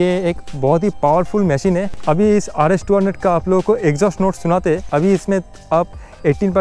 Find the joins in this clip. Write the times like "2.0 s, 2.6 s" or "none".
1.9 s, 4.8 s